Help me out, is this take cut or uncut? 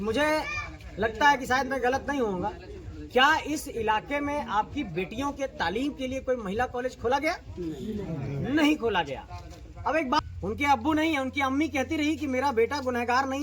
cut